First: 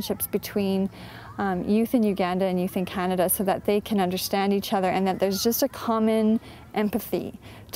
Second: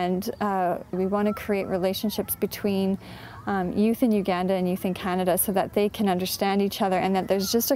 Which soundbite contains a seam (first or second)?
second